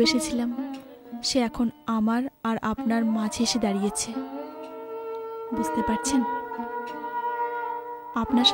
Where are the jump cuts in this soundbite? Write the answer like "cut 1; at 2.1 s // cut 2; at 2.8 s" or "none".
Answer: none